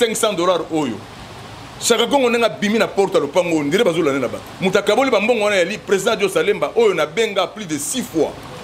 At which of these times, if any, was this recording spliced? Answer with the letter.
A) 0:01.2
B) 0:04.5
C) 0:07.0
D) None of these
B